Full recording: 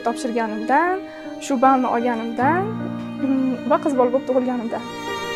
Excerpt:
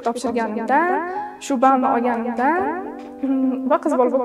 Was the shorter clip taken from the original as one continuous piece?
yes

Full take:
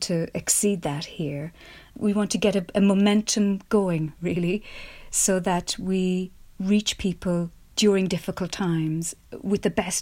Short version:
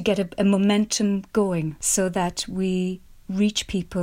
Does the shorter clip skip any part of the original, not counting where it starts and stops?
yes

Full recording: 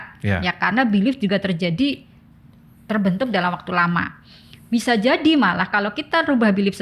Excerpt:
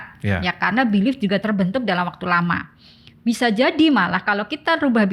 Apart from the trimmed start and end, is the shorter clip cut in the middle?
yes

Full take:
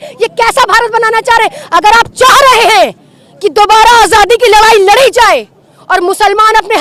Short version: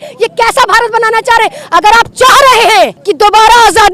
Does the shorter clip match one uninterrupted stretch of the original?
no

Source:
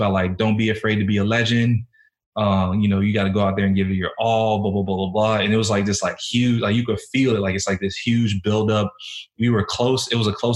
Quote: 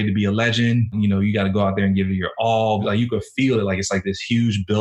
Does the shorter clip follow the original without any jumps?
no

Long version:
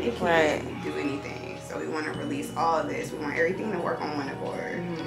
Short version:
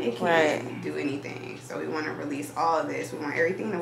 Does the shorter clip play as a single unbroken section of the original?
yes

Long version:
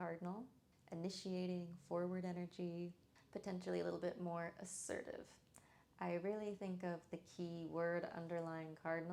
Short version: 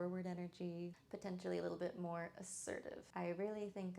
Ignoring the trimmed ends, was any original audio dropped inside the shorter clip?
yes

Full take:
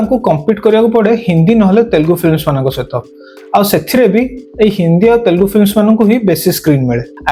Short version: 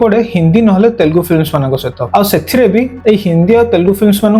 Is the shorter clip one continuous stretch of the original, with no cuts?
no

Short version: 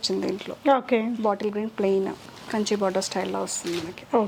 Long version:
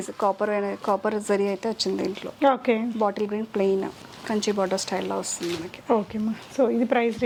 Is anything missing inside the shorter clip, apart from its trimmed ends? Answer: no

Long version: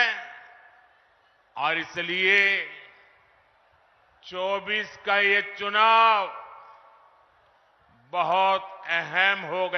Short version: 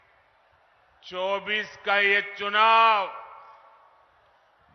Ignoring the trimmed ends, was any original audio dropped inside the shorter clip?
no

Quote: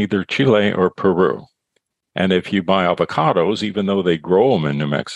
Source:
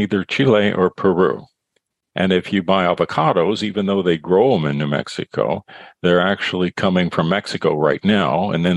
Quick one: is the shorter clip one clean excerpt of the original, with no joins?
yes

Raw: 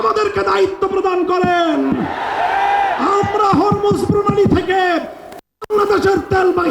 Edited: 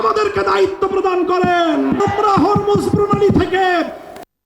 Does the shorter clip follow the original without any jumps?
no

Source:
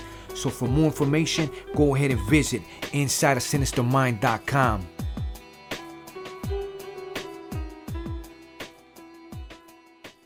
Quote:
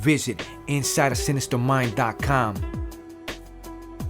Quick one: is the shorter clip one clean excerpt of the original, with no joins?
no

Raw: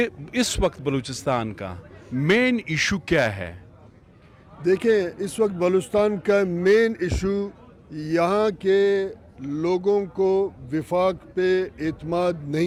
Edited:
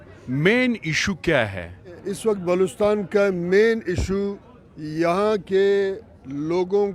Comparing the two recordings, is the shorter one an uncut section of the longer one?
no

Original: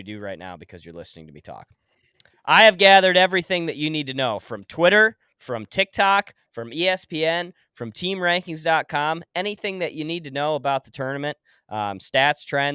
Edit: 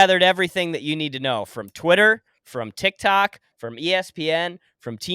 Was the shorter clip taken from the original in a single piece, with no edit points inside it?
yes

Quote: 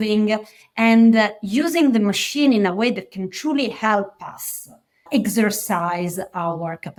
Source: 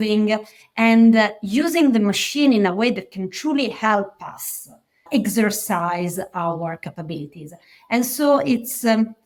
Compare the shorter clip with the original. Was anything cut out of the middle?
no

